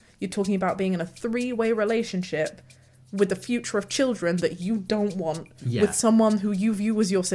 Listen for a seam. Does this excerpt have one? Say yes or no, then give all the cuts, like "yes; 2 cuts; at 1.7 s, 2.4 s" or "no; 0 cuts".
no; 0 cuts